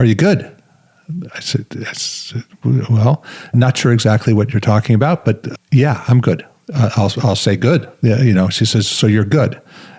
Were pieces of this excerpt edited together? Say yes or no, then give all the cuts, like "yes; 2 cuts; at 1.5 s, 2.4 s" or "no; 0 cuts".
yes; 2 cuts; at 3.5 s, 5.5 s